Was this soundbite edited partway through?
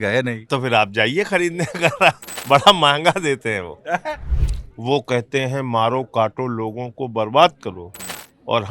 yes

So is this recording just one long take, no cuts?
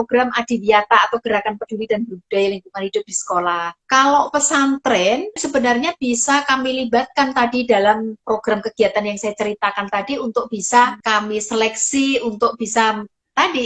no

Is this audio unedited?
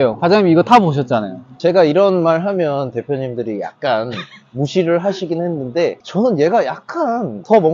yes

